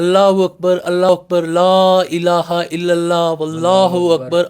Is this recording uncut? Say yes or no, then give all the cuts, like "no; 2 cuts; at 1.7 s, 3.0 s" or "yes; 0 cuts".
no; 1 cut; at 1.1 s